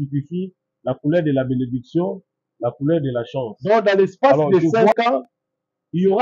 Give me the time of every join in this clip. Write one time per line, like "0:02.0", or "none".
0:03.5